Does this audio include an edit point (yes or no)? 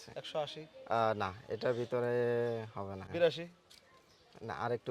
yes